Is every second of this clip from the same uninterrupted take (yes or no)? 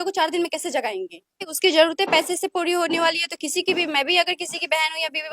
no